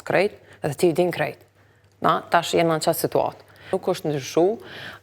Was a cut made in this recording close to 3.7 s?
yes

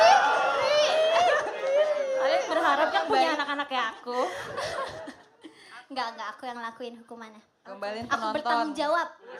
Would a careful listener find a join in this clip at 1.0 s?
no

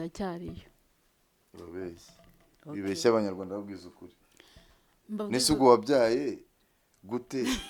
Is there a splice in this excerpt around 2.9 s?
no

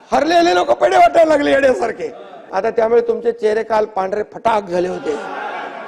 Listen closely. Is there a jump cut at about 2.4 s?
yes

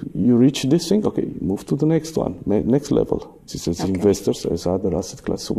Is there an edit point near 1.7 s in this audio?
no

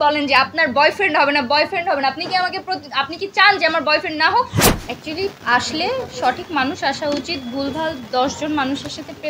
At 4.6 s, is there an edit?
yes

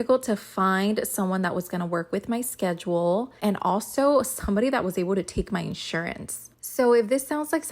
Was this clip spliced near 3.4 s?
yes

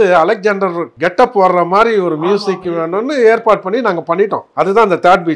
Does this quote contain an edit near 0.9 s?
yes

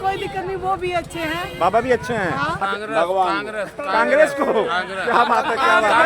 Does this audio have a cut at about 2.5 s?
yes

